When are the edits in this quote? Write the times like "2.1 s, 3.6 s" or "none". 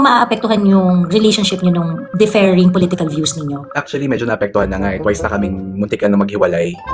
3.6 s